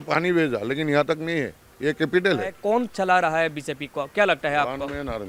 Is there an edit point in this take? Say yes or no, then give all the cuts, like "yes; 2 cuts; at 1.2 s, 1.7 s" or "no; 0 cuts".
yes; 1 cut; at 2.6 s